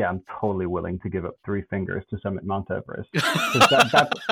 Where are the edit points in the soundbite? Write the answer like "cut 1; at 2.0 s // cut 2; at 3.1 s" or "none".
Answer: cut 1; at 3.0 s